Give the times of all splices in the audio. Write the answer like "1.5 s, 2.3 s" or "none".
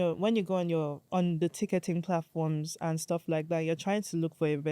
1.0 s